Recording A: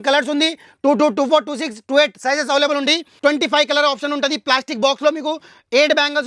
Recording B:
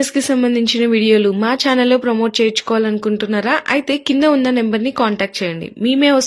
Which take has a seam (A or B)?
A